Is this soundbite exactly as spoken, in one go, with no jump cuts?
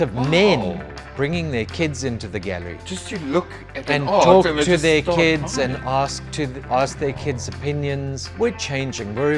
no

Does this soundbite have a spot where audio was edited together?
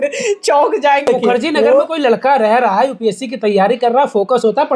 yes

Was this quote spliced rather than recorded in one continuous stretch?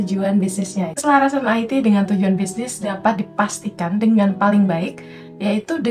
yes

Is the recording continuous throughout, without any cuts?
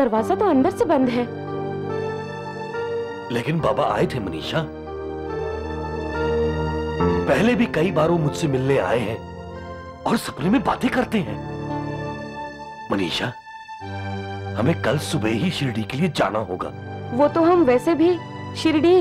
yes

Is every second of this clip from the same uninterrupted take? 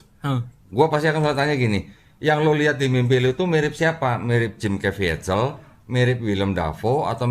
yes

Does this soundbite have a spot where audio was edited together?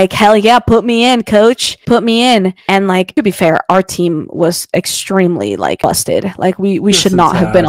no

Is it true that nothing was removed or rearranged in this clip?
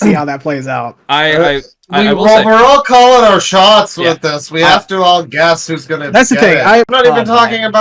no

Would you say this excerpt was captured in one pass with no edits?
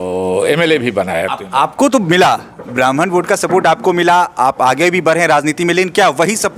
yes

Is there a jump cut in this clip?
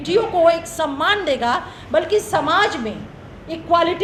no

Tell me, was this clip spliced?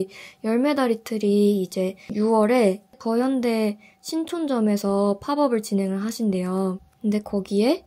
yes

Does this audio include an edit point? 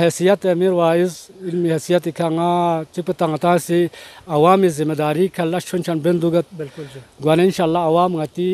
no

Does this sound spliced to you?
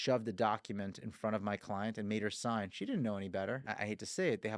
yes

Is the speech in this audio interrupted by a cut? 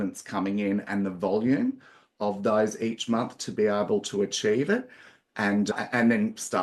no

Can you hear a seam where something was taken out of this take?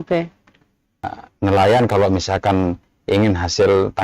yes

